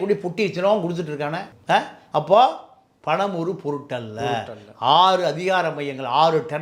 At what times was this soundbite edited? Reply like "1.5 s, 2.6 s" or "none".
none